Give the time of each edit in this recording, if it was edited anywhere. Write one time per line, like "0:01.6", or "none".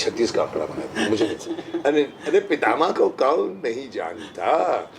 0:01.4